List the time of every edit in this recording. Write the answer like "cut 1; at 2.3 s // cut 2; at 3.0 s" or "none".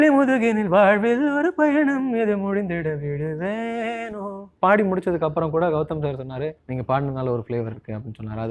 cut 1; at 4.4 s // cut 2; at 6.6 s